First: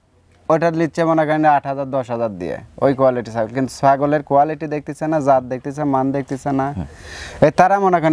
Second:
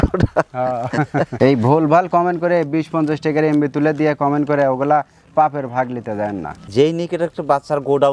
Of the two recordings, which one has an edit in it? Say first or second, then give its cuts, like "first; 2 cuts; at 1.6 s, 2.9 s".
second; 2 cuts; at 1.3 s, 6.6 s